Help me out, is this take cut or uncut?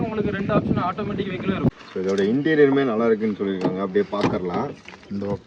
cut